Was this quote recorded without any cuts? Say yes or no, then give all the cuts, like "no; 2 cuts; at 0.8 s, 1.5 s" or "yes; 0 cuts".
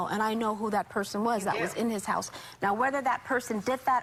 yes; 0 cuts